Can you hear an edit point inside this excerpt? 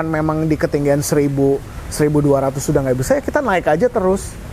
no; 0 cuts

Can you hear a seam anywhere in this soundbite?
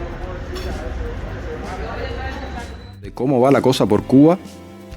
yes; 1 cut; at 3.2 s

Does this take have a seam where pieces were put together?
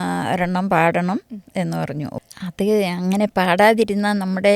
yes; 1 cut; at 2.1 s

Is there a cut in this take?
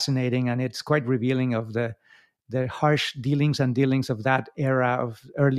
no; 0 cuts

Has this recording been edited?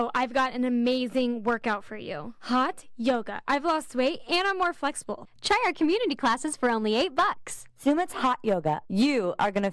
no; 0 cuts

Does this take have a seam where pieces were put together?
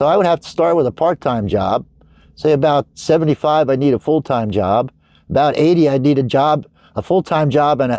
no; 0 cuts

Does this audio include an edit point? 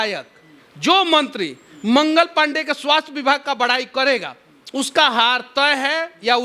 no; 0 cuts

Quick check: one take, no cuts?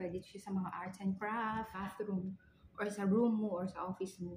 no; 1 cut; at 1.9 s

